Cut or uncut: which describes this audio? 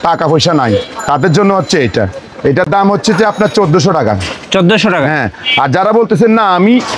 uncut